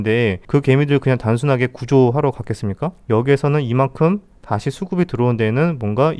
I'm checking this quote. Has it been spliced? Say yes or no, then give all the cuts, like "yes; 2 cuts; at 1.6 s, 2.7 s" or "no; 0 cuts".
yes; 1 cut; at 2.9 s